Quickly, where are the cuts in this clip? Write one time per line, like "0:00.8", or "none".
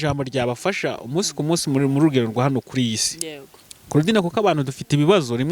none